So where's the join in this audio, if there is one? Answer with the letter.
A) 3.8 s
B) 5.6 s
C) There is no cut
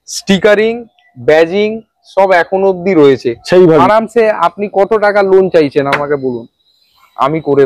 A